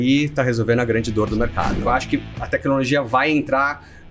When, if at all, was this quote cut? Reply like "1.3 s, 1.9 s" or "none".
1.9 s